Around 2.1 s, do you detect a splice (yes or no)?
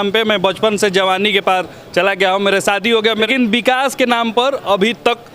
no